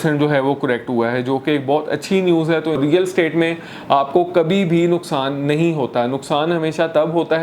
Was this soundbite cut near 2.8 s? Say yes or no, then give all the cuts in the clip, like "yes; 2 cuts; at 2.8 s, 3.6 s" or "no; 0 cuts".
yes; 1 cut; at 2.8 s